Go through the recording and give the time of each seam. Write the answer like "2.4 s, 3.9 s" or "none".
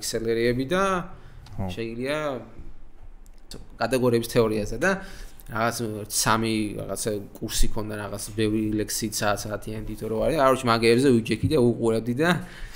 3.3 s